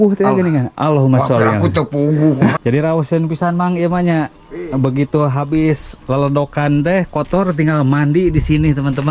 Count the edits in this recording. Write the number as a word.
one